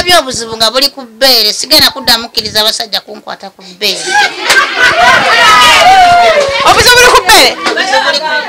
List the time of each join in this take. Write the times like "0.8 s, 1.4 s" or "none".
5.5 s